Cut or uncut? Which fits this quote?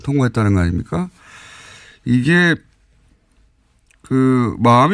cut